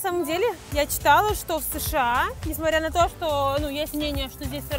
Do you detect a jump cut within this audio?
no; 0 cuts

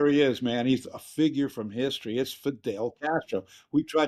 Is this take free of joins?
yes; 0 cuts

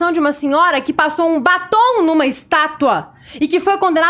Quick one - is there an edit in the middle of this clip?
no; 0 cuts

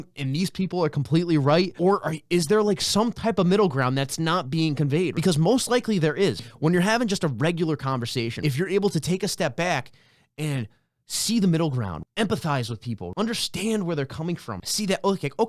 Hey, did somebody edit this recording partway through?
yes; 6 cuts; at 5.1 s, 6.4 s, 8.3 s, 12.0 s, 13.1 s, 14.5 s

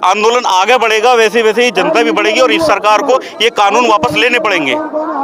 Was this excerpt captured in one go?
yes; 0 cuts

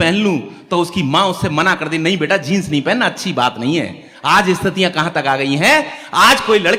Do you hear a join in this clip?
no; 0 cuts

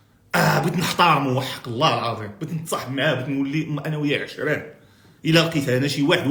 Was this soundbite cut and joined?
no; 0 cuts

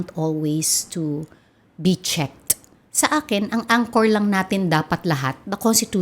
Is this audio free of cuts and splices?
no; 1 cut; at 2.8 s

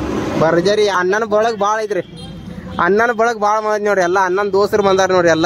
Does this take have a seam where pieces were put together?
yes; 1 cut; at 1.0 s

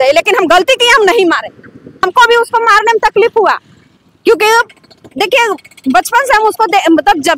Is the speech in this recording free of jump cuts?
no; 1 cut; at 2.0 s

